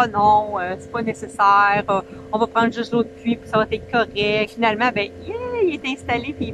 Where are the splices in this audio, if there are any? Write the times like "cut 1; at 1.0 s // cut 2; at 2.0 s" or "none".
cut 1; at 4.5 s